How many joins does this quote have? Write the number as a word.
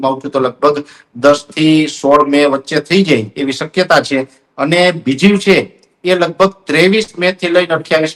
zero